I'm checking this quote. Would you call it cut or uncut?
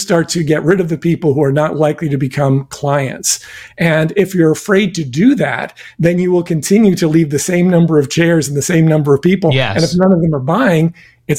uncut